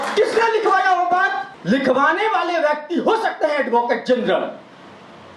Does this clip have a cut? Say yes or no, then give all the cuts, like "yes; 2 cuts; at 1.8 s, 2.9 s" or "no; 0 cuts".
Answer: yes; 1 cut; at 1.5 s